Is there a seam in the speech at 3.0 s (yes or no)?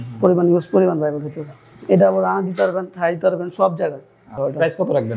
no